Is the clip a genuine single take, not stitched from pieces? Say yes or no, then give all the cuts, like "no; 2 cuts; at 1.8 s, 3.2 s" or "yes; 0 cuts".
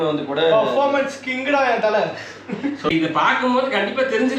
no; 1 cut; at 2.8 s